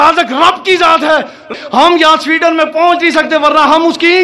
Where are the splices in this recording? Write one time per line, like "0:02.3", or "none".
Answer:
0:01.5